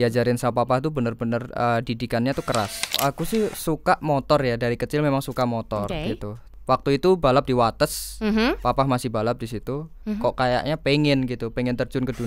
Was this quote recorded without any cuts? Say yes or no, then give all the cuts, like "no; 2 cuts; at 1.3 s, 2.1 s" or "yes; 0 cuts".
no; 3 cuts; at 3.0 s, 6.4 s, 10.1 s